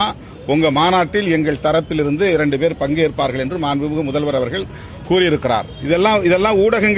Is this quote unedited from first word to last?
no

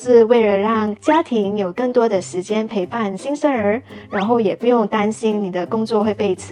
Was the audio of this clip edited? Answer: no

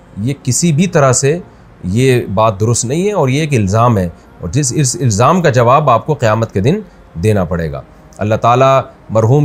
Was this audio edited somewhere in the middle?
no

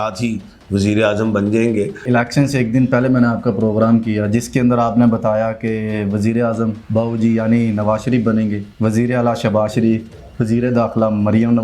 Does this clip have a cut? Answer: yes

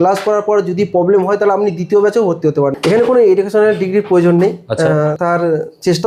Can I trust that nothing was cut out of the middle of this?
no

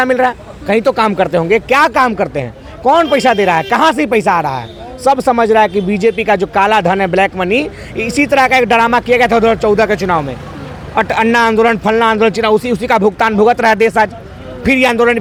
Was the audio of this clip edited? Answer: no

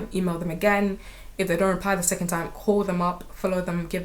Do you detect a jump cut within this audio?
no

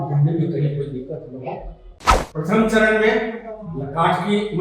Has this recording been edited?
yes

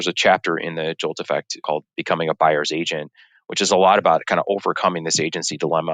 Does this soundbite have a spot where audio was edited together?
yes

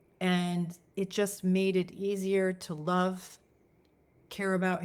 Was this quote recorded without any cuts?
yes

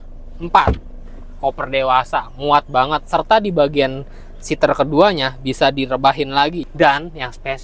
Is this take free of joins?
no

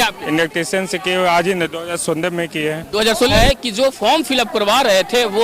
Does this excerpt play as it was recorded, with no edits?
no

